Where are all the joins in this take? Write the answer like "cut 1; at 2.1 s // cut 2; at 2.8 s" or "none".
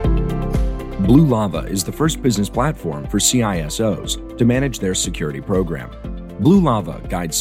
cut 1; at 1.0 s